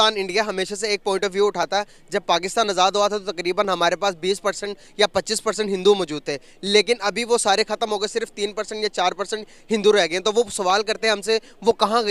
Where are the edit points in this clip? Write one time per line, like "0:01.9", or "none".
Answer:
none